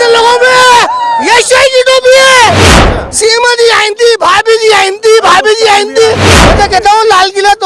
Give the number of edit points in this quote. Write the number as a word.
two